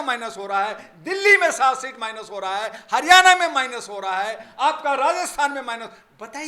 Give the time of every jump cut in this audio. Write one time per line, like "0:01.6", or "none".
none